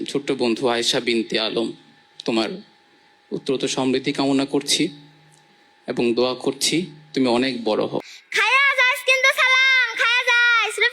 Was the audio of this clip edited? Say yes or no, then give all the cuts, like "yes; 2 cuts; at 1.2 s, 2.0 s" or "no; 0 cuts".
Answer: yes; 1 cut; at 8.2 s